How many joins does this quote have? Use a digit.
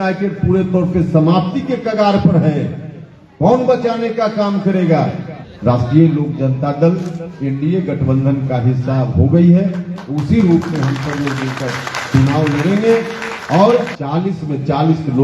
2